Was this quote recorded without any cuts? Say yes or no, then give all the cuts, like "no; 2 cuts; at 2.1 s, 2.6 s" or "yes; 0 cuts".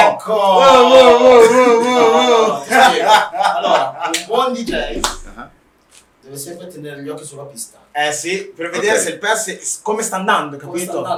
yes; 0 cuts